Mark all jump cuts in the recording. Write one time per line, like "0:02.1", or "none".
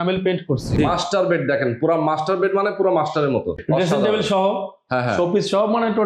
0:00.8
0:03.6